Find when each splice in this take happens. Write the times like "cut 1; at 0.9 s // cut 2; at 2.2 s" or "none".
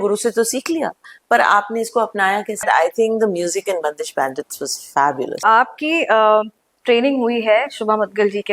cut 1; at 2.6 s // cut 2; at 5.4 s